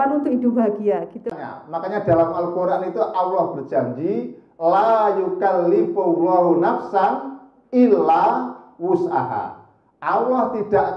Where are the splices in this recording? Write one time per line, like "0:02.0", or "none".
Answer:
0:01.3